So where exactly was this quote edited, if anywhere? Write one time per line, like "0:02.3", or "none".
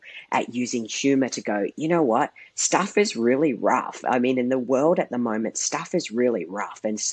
none